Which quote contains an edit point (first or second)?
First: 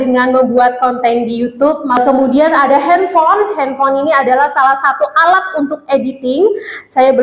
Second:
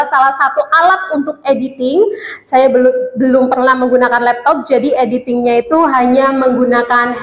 first